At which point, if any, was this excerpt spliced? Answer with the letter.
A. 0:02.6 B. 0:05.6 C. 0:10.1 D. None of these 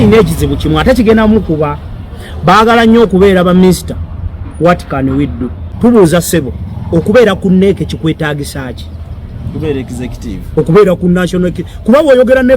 B